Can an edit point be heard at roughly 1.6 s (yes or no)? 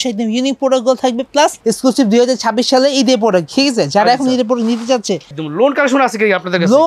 yes